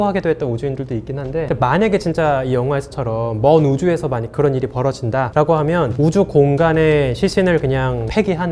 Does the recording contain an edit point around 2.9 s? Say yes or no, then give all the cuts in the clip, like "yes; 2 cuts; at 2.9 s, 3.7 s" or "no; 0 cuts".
no; 2 cuts; at 1.5 s, 5.9 s